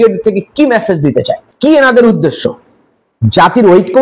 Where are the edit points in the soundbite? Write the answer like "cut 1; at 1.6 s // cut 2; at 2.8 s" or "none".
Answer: cut 1; at 1.4 s